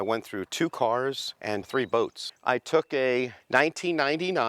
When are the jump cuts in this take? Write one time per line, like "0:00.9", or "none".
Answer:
0:01.7
0:03.4